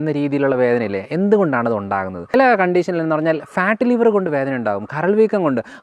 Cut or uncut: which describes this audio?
cut